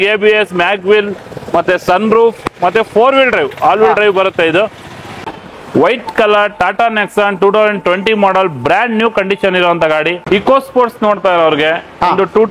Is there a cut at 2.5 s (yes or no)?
no